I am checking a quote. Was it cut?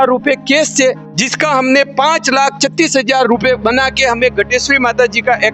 no; 0 cuts

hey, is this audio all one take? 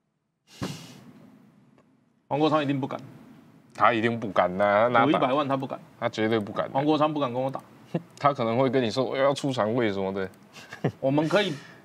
yes; 0 cuts

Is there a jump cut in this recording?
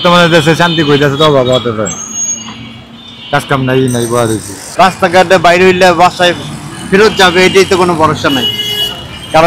yes; 1 cut; at 4.6 s

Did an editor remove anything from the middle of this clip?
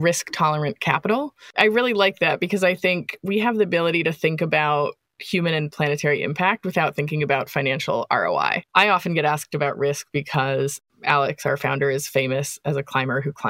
yes; 1 cut; at 8.6 s

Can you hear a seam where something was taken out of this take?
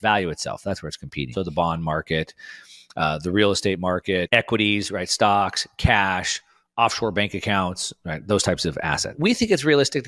yes; 2 cuts; at 1.3 s, 9.1 s

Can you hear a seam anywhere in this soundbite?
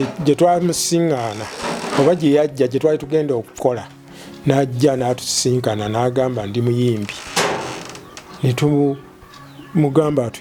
no; 0 cuts

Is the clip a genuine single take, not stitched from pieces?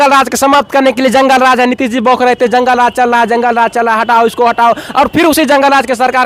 yes; 0 cuts

